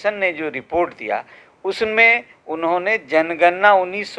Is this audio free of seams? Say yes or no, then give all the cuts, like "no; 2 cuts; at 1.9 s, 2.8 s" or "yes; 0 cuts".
yes; 0 cuts